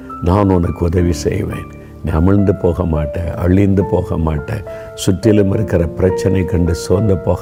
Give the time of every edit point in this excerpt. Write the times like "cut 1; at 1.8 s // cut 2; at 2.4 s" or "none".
none